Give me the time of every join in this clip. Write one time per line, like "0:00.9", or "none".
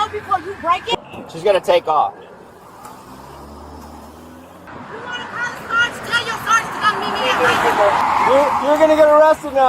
0:00.9
0:04.7